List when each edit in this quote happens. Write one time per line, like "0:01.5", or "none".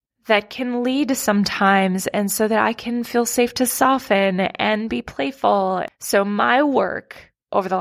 0:05.9